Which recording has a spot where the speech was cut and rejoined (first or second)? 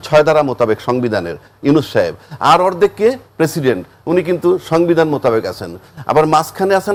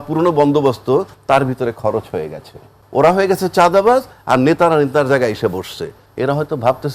second